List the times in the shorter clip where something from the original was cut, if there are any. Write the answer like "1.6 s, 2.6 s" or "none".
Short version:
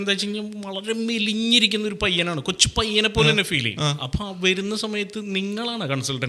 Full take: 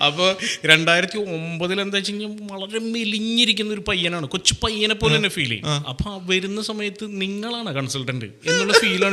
none